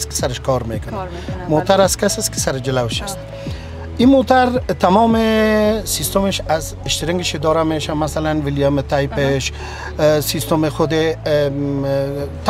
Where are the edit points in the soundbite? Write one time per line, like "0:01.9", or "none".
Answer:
none